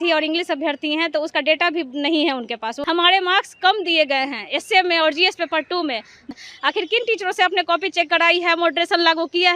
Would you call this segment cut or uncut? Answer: cut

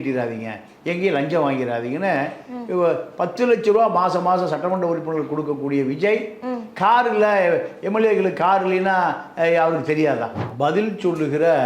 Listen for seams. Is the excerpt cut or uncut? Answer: cut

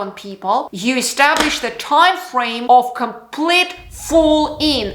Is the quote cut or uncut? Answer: uncut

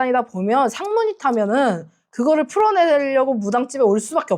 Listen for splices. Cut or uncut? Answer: uncut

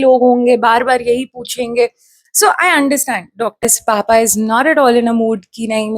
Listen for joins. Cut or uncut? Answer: cut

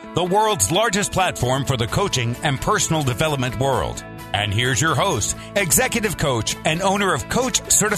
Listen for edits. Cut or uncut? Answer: uncut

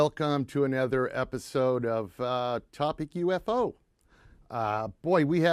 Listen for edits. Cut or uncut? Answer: uncut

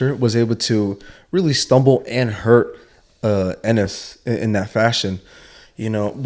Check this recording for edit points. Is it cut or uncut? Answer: uncut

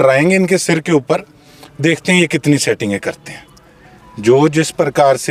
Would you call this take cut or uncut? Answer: uncut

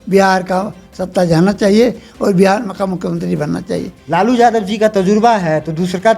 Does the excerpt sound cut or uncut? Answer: cut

